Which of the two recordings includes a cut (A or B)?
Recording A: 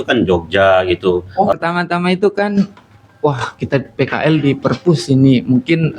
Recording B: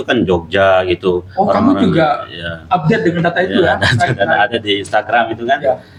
A